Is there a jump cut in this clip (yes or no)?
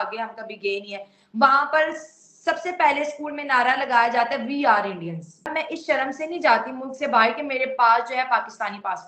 yes